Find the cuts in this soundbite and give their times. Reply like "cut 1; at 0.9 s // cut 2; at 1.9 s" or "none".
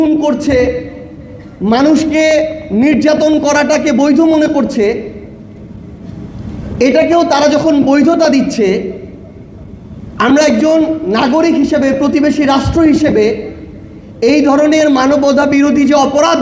none